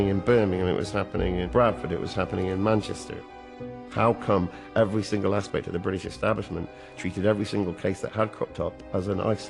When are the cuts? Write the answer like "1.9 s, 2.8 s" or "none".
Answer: 1.4 s, 3.6 s